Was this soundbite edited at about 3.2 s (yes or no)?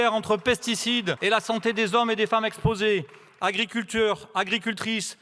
no